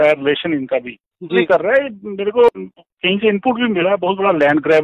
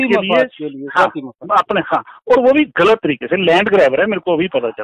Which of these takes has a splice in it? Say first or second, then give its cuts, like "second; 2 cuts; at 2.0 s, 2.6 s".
first; 2 cuts; at 1.5 s, 2.5 s